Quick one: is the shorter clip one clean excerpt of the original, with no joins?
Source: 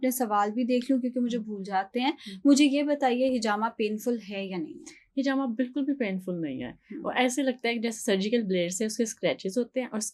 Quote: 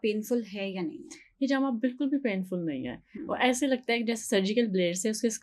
yes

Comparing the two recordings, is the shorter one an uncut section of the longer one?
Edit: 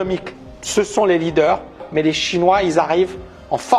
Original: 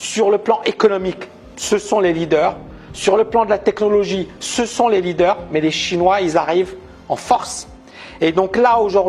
no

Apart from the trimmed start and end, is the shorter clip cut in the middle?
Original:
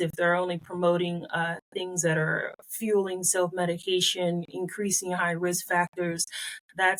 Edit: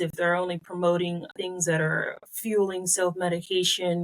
yes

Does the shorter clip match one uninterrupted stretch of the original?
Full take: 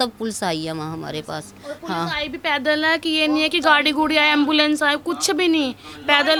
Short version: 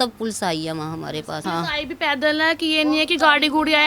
no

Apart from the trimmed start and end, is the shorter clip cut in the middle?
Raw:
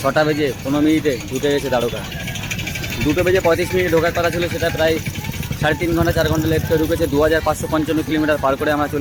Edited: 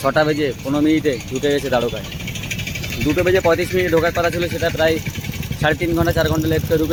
no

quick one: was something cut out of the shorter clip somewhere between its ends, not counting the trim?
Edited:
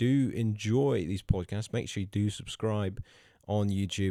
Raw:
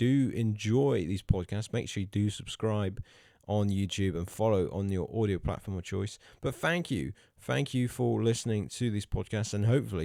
no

